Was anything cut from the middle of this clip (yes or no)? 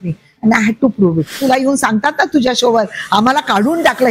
yes